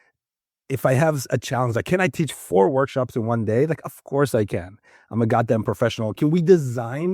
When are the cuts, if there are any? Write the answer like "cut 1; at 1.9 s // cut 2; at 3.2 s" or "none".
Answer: cut 1; at 6.2 s